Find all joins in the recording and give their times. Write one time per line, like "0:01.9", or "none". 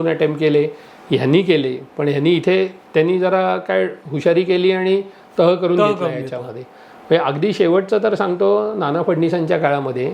none

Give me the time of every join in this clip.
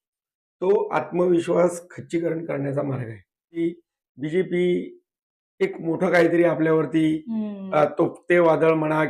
0:03.6

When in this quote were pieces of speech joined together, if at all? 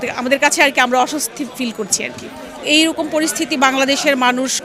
0:02.6

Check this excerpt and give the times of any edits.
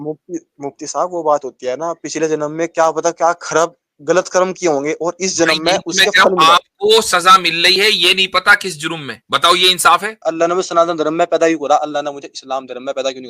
0:09.1
0:10.3

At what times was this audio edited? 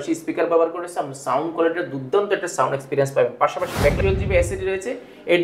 0:04.0

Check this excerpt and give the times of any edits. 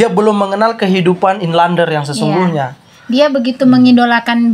none

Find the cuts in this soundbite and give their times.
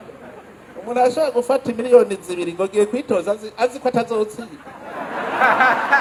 none

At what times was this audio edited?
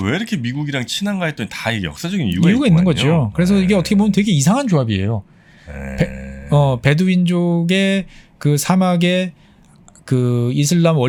none

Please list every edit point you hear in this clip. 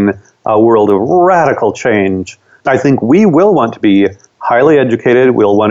none

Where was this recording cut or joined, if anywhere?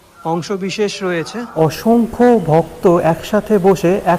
0:01.5

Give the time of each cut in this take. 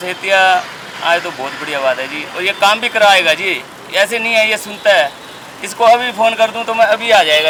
none

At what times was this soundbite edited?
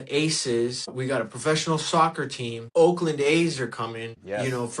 0:00.9
0:02.5

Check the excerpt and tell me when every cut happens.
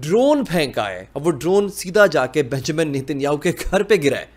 none

